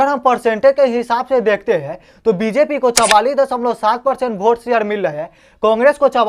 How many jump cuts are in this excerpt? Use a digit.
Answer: 0